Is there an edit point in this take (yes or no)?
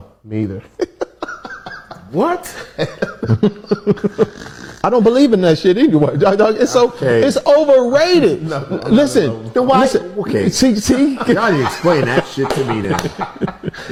no